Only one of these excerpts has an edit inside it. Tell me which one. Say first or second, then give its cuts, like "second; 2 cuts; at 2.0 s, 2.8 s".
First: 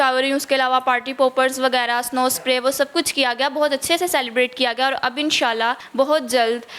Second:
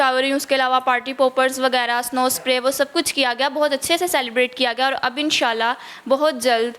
first; 1 cut; at 5.8 s